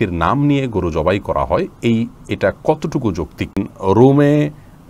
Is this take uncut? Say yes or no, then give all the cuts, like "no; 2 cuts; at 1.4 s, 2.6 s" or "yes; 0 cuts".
no; 1 cut; at 3.7 s